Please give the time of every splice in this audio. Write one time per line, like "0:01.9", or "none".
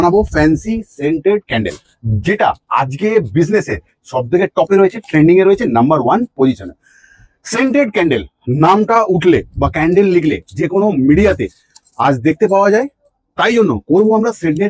none